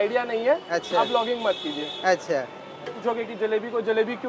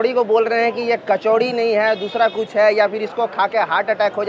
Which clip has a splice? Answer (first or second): first